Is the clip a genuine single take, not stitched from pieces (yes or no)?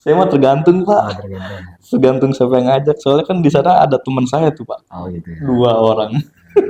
yes